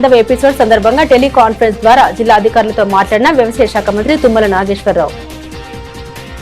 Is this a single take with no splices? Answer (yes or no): yes